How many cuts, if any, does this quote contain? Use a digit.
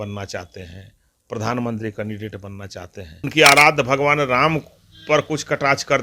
1